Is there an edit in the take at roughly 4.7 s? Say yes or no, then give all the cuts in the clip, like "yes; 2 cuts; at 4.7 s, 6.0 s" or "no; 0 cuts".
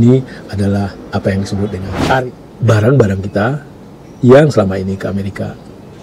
no; 1 cut; at 2.2 s